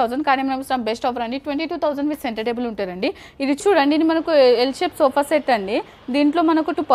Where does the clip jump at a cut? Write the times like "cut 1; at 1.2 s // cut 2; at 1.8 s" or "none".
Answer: cut 1; at 3.6 s